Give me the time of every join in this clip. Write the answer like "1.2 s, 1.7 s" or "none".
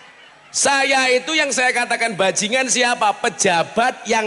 none